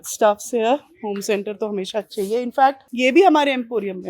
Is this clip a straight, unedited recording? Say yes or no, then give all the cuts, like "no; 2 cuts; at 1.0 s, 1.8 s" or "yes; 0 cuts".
yes; 0 cuts